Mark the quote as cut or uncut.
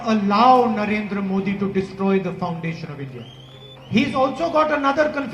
uncut